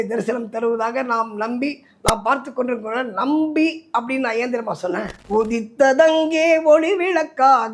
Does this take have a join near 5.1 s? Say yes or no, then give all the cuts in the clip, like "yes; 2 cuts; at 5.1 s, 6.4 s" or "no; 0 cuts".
yes; 1 cut; at 5.1 s